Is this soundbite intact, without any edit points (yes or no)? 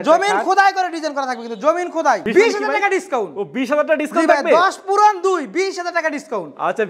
no